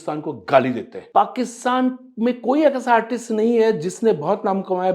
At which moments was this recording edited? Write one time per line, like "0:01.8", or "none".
0:01.0